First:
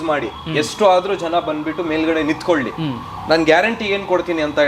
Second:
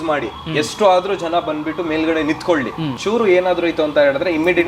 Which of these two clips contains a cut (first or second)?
second